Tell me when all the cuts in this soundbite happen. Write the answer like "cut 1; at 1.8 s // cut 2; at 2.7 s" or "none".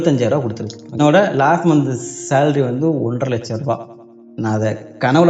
cut 1; at 1.0 s